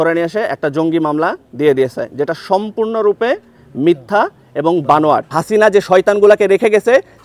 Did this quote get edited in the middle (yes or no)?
yes